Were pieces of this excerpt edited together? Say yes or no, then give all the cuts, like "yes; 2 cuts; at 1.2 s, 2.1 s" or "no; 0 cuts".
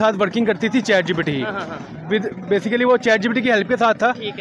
no; 0 cuts